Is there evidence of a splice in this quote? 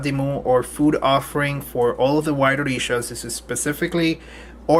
yes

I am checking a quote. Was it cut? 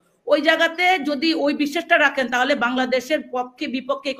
no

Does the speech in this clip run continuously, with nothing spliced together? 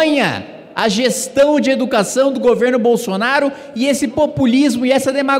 yes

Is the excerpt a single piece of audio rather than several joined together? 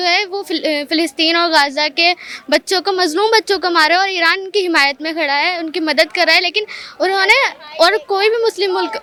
yes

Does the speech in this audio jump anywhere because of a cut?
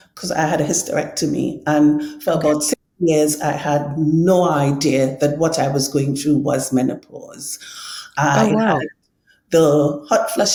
no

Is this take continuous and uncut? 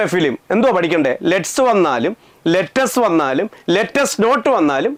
yes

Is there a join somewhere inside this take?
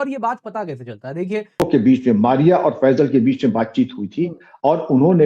yes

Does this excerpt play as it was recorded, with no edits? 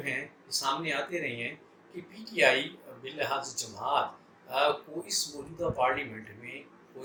yes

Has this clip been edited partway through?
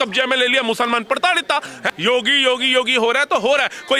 yes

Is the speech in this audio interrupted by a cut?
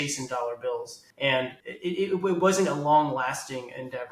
yes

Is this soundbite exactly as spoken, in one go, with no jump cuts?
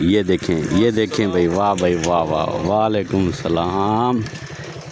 yes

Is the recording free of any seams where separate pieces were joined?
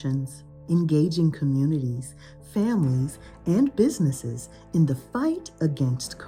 yes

